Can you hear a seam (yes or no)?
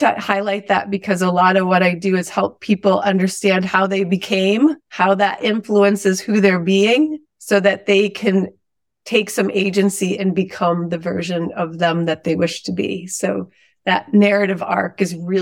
no